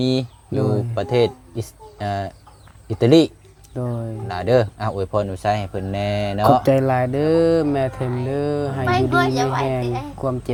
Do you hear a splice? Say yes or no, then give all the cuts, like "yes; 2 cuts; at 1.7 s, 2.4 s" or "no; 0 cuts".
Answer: no; 0 cuts